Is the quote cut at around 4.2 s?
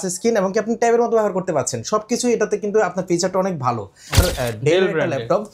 yes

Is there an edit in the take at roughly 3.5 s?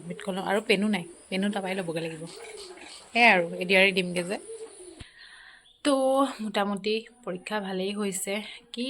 no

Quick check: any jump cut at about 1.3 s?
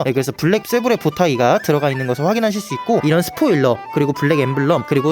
no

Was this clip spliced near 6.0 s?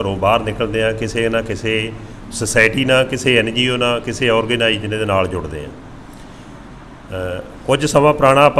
no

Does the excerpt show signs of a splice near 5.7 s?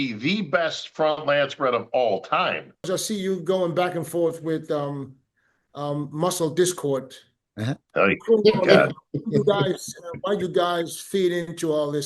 no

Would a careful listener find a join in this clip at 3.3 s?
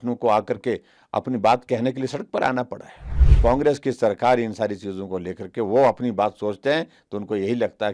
yes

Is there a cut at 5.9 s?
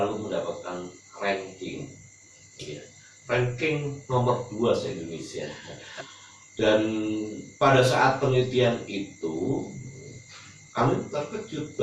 yes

